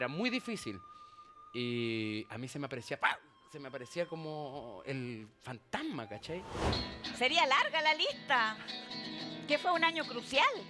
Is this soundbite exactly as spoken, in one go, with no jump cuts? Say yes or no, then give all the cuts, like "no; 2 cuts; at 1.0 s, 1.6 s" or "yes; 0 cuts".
no; 1 cut; at 6.7 s